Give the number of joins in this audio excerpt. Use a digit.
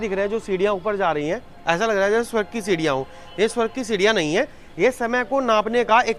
0